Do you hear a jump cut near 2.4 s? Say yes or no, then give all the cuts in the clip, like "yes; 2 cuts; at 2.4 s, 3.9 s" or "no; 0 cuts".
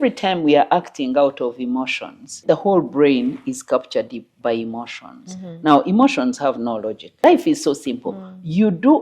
yes; 2 cuts; at 2.4 s, 7.2 s